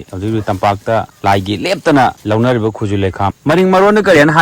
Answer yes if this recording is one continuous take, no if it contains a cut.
no